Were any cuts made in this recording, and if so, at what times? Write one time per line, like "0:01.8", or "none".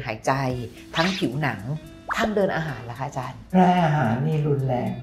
0:03.4

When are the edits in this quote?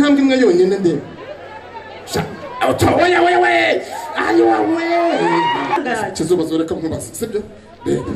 0:05.8

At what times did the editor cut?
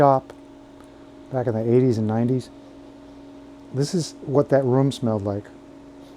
none

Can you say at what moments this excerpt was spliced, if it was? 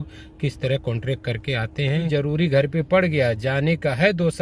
0:02.1

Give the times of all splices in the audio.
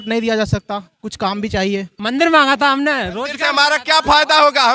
0:01.9

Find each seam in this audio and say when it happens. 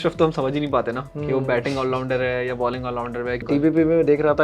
0:01.1
0:03.5

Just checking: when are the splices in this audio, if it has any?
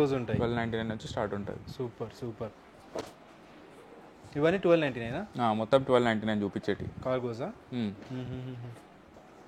none

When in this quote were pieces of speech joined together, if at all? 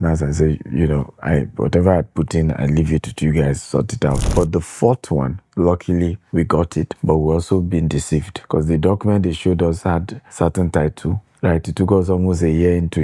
0:04.2
0:05.4
0:06.2
0:08.4
0:10.2

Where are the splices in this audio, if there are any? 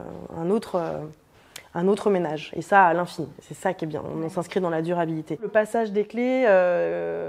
0:05.5

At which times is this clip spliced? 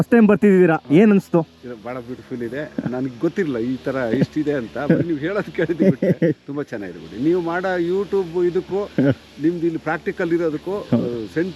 none

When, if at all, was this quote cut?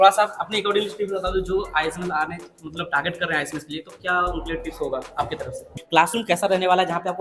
0:05.7

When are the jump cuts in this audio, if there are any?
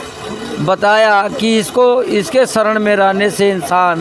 none

